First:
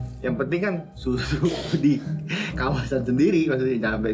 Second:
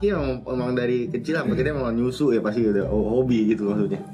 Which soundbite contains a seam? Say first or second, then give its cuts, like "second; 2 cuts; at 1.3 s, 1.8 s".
first; 1 cut; at 0.9 s